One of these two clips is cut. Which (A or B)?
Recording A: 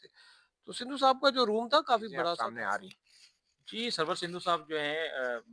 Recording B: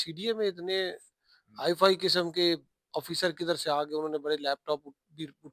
A